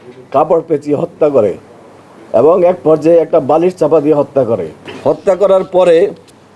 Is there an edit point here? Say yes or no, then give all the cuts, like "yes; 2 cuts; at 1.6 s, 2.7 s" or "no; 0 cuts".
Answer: no; 0 cuts